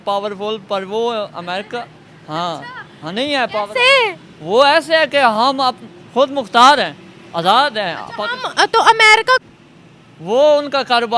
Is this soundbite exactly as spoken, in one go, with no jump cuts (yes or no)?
no